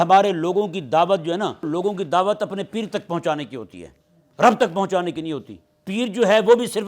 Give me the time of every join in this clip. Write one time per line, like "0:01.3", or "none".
0:01.7